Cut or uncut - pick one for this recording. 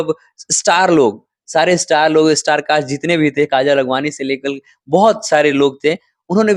uncut